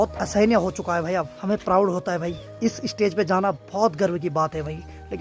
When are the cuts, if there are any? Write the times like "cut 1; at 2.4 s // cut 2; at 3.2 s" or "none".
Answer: cut 1; at 1.3 s // cut 2; at 2.4 s